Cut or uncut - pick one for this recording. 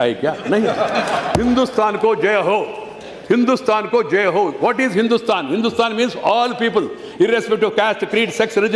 uncut